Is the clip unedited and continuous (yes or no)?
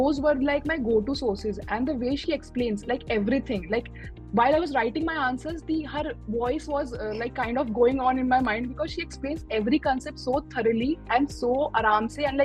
yes